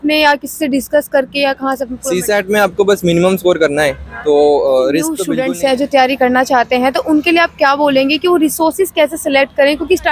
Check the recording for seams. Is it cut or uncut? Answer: cut